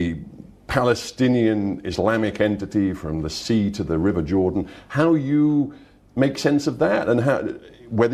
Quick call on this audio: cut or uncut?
uncut